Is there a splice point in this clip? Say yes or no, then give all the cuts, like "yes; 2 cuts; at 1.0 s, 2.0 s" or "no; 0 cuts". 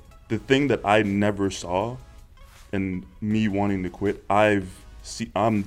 no; 0 cuts